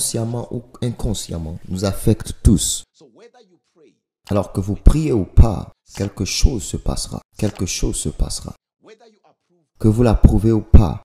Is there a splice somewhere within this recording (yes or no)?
no